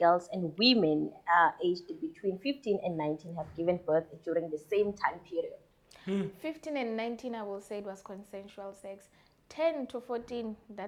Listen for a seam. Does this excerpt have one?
no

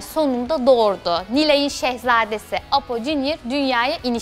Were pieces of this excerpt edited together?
no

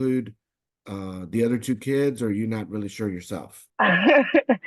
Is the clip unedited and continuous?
no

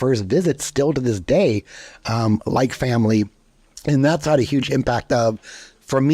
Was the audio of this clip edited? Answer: no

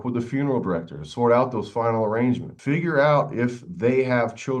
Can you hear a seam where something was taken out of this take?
yes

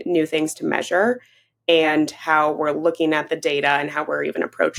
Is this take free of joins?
yes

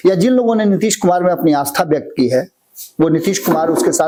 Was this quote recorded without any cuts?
yes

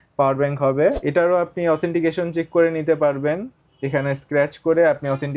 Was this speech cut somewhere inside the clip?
yes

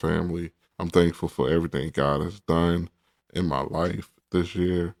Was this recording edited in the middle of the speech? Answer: no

